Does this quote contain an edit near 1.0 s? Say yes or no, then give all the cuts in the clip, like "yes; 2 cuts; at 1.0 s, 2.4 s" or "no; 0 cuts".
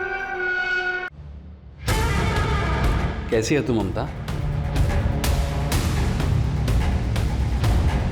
yes; 1 cut; at 1.0 s